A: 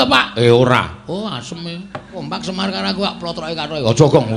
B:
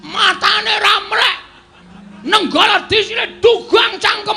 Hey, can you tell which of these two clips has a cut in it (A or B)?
A